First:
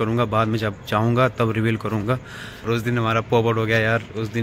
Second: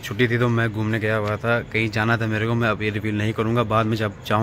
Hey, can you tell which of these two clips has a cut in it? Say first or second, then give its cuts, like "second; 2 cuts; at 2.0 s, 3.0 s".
first; 1 cut; at 2.7 s